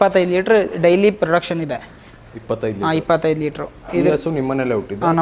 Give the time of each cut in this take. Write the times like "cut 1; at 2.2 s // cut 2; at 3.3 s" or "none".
none